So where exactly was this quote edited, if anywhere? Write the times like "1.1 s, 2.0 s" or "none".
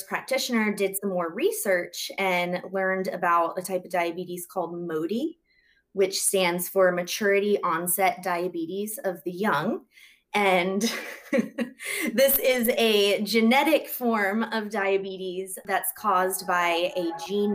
none